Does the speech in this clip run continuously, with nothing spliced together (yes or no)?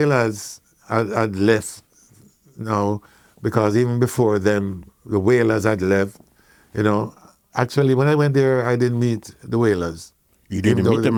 yes